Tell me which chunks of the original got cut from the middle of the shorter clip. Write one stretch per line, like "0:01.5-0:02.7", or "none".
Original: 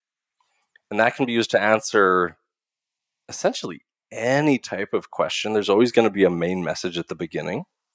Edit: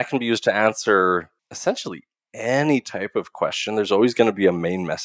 0:02.5-0:03.2